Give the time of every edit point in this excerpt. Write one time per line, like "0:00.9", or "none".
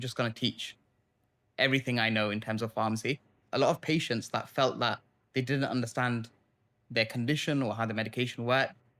0:03.5